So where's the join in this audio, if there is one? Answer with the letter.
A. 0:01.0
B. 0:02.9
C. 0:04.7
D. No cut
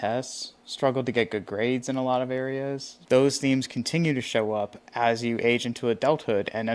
B